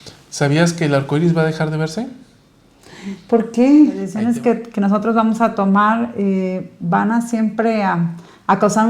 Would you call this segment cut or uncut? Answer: cut